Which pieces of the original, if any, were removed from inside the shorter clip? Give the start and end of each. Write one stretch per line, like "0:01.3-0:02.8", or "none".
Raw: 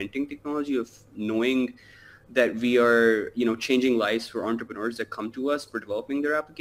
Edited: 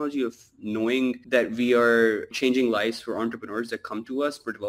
0:01.8-0:02.3
0:03.3-0:03.6